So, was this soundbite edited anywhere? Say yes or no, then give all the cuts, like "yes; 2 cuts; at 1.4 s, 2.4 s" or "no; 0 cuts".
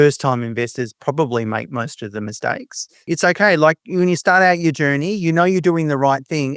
yes; 1 cut; at 3.0 s